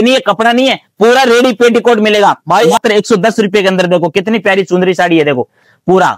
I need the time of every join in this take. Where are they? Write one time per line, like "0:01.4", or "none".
0:02.8